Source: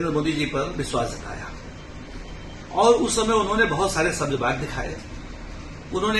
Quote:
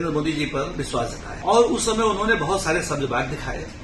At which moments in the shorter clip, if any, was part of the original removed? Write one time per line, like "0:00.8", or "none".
0:01.3